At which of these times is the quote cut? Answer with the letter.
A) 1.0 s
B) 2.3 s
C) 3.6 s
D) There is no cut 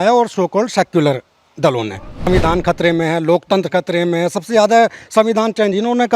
B